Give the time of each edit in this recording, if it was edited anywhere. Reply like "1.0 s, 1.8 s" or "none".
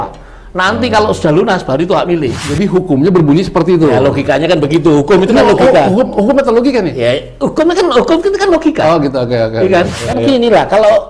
2.3 s, 10.0 s